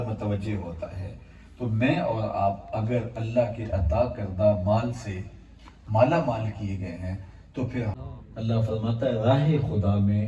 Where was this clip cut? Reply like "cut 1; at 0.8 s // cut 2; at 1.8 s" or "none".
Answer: cut 1; at 7.9 s